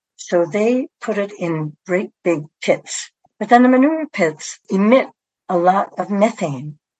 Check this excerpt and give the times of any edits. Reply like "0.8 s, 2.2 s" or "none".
3.1 s